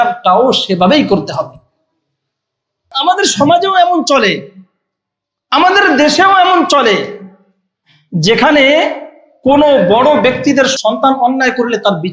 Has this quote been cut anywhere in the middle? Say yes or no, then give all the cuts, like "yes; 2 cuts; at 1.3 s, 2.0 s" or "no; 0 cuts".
yes; 1 cut; at 2.9 s